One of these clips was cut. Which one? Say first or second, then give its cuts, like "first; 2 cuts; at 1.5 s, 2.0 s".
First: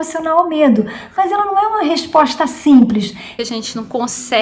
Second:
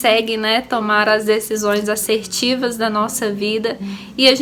first; 1 cut; at 3.3 s